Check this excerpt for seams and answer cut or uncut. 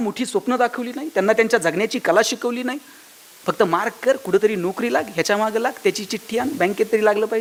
uncut